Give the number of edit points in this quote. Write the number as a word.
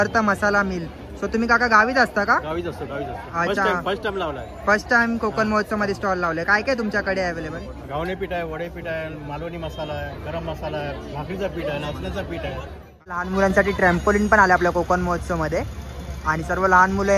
one